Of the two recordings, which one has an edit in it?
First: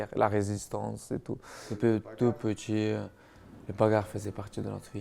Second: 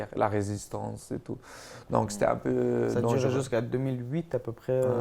first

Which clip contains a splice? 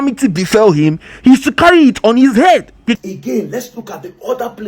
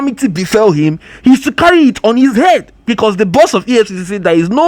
first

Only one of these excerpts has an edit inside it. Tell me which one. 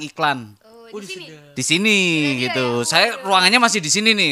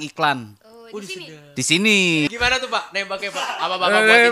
second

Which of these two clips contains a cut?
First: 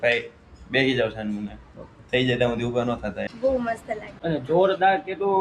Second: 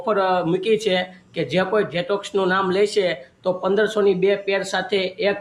first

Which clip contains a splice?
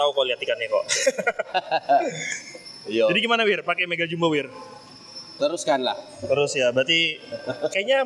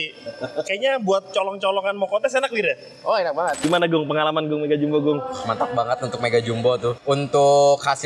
second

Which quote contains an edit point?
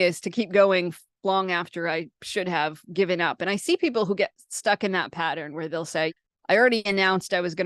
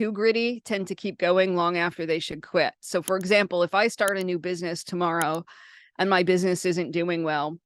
first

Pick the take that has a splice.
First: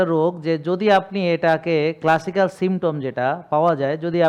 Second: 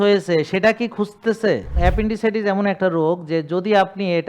second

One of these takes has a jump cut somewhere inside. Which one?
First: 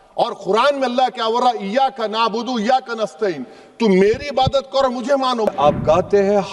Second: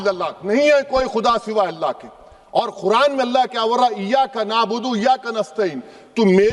first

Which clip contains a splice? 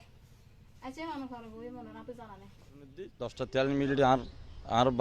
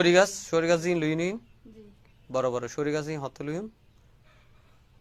first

